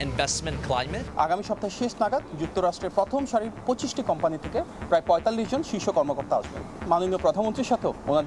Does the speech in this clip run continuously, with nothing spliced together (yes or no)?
no